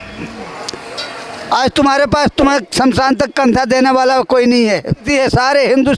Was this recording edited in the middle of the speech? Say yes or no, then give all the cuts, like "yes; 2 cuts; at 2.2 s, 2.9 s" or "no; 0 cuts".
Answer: yes; 1 cut; at 5.0 s